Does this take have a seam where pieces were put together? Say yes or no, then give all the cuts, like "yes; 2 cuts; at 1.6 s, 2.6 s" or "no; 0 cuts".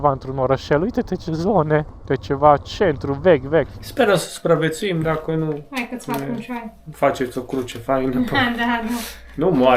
yes; 2 cuts; at 2.0 s, 3.8 s